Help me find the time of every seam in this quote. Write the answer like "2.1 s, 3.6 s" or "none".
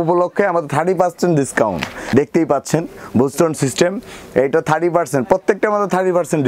2.0 s